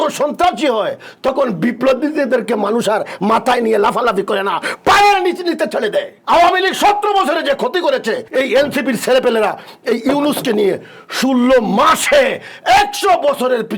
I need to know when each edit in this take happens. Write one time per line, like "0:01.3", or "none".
0:06.1
0:08.2